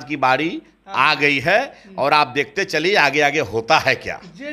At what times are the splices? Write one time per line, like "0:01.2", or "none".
none

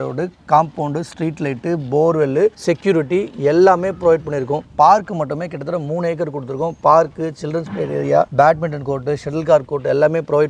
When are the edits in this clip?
none

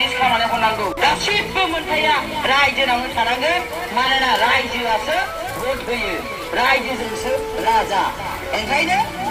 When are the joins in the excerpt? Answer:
0:00.9

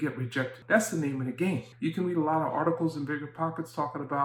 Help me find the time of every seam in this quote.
none

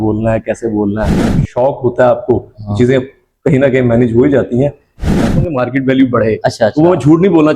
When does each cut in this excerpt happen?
0:01.4
0:05.2

